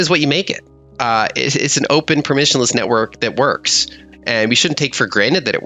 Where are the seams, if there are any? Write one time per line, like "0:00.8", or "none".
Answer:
0:04.0